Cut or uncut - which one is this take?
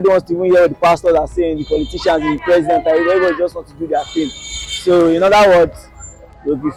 uncut